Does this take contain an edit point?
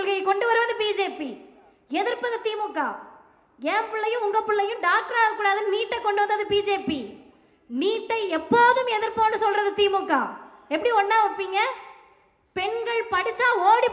no; 0 cuts

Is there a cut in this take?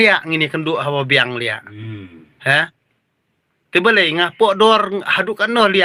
no; 0 cuts

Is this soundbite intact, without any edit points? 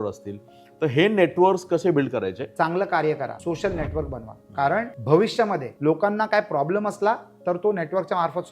no; 4 cuts; at 2.4 s, 3.4 s, 4.9 s, 5.7 s

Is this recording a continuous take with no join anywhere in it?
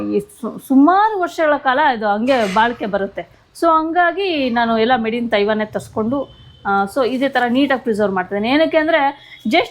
yes; 0 cuts

